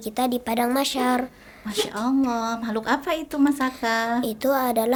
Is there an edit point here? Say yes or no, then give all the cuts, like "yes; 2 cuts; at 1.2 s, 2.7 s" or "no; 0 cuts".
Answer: no; 0 cuts